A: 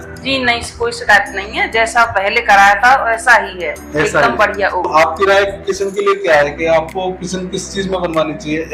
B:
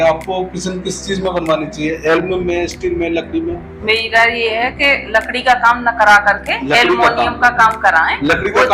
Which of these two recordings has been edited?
A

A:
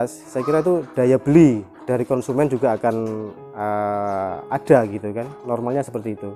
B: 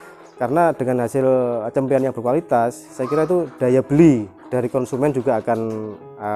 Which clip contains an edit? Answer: A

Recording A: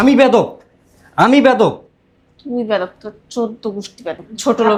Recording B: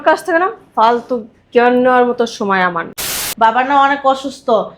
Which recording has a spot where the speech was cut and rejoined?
B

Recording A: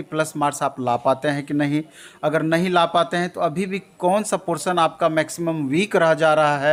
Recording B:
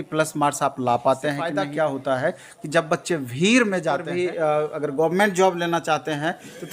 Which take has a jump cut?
B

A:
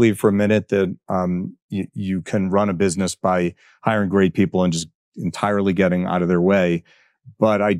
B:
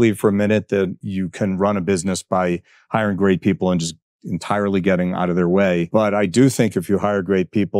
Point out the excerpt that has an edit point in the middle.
B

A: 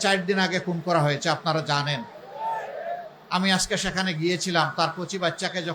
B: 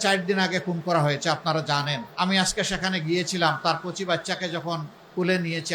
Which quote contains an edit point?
B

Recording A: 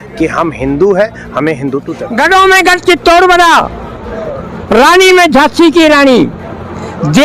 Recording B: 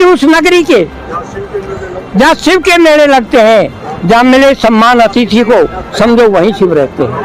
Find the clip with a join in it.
A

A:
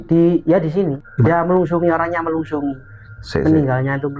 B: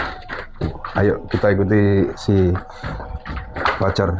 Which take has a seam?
A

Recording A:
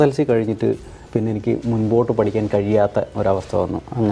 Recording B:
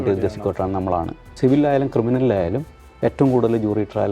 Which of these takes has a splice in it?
B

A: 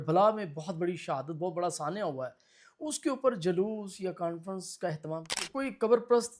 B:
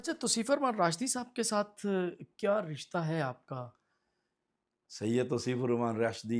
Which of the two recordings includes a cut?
A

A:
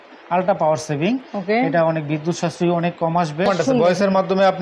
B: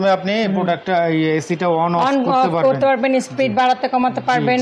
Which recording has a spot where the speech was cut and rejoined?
A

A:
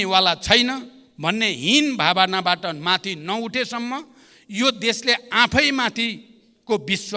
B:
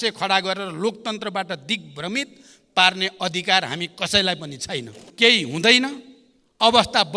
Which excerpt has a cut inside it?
B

